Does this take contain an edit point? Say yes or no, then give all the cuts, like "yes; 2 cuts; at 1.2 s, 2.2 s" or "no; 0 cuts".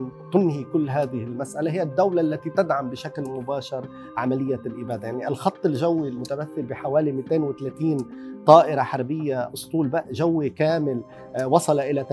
no; 0 cuts